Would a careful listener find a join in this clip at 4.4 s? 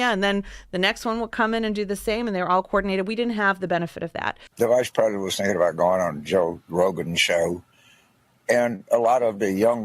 yes; 1 cut; at 4.4 s

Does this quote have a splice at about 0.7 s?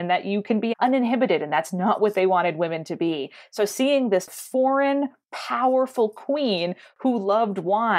yes; 2 cuts; at 0.7 s, 4.3 s

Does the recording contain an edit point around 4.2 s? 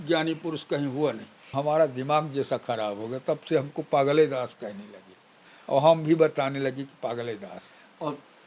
no; 1 cut; at 1.5 s

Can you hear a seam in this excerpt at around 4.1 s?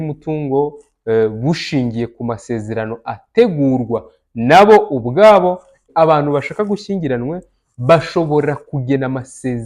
no; 1 cut; at 5.8 s

